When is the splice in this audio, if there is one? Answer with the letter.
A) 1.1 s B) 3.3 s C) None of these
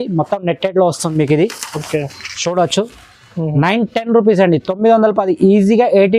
C